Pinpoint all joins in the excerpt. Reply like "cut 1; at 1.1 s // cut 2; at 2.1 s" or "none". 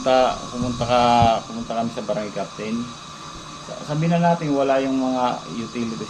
none